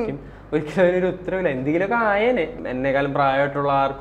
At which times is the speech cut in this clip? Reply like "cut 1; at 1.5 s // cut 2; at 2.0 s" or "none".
cut 1; at 2.5 s